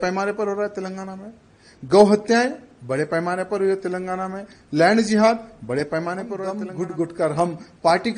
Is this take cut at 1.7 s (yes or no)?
no